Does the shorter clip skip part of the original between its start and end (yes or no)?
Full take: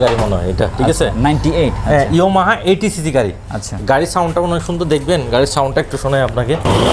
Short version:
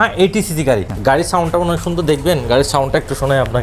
yes